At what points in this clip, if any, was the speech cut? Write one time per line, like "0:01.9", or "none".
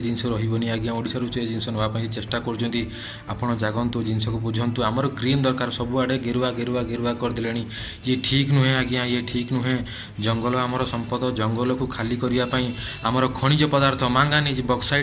none

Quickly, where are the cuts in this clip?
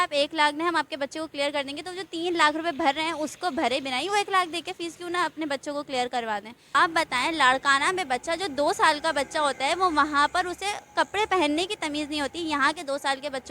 0:06.6

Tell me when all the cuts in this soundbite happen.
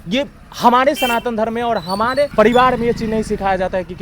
0:02.3

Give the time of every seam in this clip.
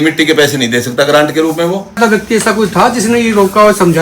0:02.0

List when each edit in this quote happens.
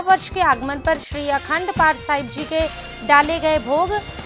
none

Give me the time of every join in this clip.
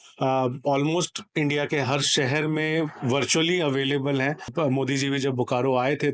0:04.5

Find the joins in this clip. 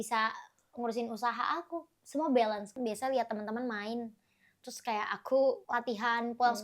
0:02.8
0:05.6

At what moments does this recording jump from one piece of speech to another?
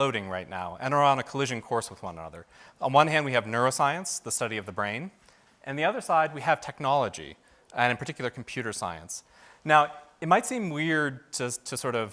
0:05.9

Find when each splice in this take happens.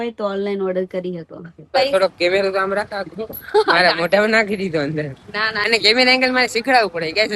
0:01.7
0:05.6

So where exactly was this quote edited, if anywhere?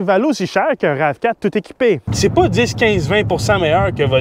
0:02.1

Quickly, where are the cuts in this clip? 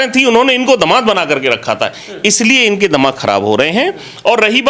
none

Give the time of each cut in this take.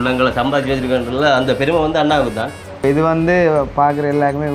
0:02.7

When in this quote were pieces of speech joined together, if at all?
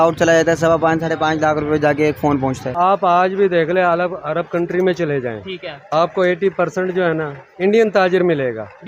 0:02.7

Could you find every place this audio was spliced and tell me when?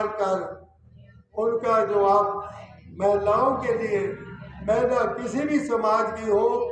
none

